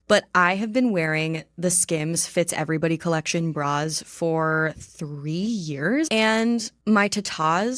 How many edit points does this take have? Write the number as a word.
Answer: one